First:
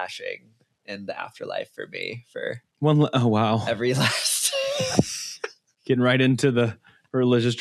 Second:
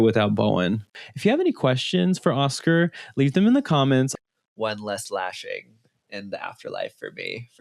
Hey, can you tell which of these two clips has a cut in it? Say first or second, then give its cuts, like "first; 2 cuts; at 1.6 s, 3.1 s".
second; 2 cuts; at 1.0 s, 4.1 s